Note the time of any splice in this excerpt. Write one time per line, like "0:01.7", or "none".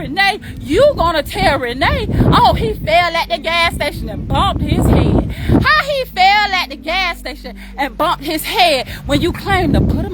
none